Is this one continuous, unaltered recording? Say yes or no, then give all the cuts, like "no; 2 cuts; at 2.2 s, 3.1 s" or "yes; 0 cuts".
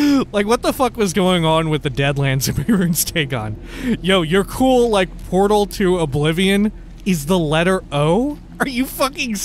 no; 2 cuts; at 6.9 s, 8.5 s